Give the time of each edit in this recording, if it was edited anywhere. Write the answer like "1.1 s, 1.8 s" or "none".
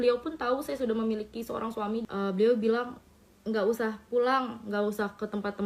2.0 s